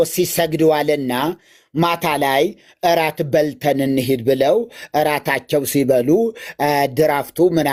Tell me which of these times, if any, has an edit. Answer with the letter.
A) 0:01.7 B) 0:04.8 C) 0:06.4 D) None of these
D